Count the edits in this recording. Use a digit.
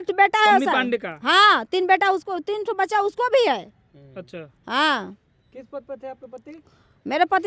0